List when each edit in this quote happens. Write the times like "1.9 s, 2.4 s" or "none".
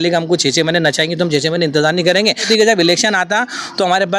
2.5 s